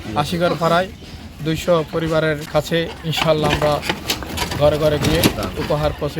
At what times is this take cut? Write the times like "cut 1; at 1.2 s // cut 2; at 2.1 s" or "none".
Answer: cut 1; at 2.4 s